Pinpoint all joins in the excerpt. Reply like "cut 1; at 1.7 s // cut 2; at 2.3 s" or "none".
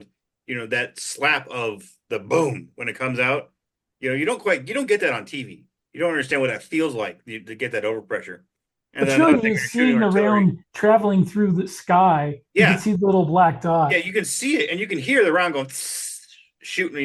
none